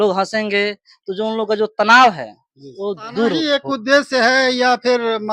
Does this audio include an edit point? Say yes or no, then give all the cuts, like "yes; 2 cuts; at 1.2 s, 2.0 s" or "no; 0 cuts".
yes; 1 cut; at 3.4 s